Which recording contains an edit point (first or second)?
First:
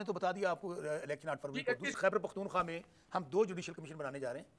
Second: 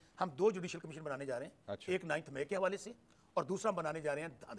first